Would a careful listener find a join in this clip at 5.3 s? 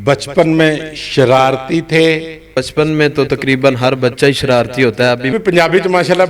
yes; 2 cuts; at 2.6 s, 5.3 s

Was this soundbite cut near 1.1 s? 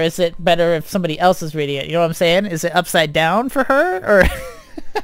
no; 0 cuts

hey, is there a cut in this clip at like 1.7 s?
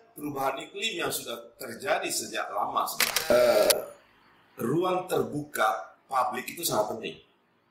no; 1 cut; at 3.3 s

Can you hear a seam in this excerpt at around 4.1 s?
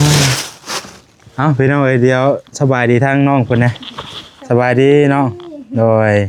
no; 0 cuts

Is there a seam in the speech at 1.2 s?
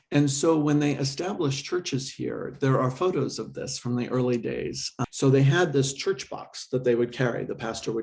no; 1 cut; at 4.9 s

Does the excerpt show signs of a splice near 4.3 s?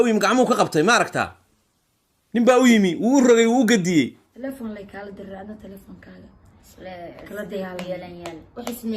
yes; 1 cut; at 4.3 s

